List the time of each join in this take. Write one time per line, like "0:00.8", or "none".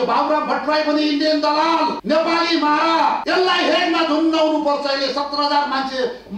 0:02.0
0:03.2